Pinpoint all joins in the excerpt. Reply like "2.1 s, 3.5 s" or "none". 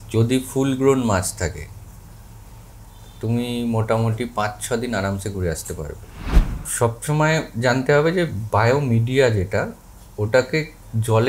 6.1 s